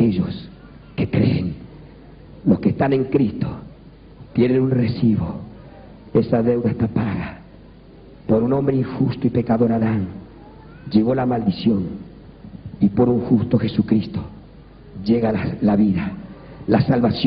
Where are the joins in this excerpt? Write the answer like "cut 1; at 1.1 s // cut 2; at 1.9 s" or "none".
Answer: cut 1; at 7.1 s